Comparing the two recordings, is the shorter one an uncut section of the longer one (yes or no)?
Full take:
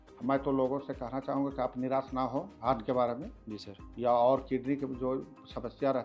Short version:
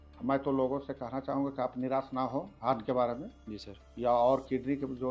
yes